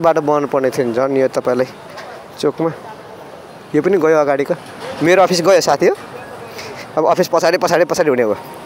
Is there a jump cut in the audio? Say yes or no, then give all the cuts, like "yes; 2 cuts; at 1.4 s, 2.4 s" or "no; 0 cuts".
no; 0 cuts